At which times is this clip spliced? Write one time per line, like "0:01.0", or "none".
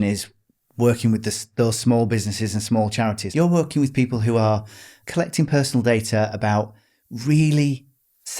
0:03.2
0:05.0